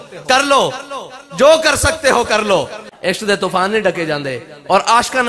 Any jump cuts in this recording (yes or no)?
yes